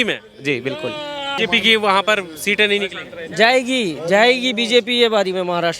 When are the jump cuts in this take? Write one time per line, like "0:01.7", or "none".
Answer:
0:01.3